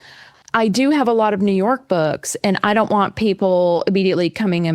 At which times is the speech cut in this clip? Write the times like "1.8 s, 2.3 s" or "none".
none